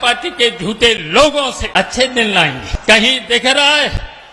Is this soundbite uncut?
no; 2 cuts; at 1.6 s, 2.7 s

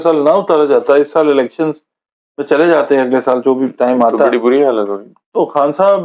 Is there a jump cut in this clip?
no; 0 cuts

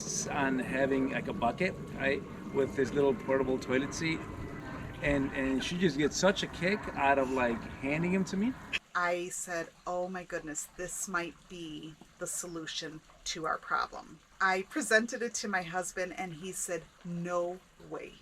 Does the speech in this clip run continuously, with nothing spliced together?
no; 3 cuts; at 4.5 s, 8.8 s, 14.4 s

